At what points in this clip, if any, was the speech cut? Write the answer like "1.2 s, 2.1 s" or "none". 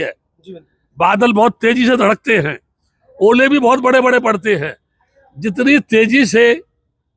none